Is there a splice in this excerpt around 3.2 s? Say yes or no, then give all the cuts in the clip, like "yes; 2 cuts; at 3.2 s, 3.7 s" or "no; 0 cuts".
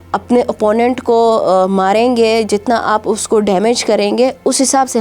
no; 0 cuts